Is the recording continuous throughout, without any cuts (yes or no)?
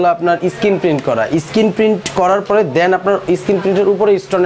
yes